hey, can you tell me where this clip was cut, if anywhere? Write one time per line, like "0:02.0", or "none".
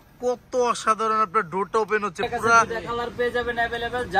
0:02.7